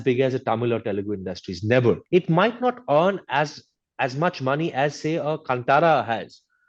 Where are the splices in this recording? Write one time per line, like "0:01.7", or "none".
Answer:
0:02.0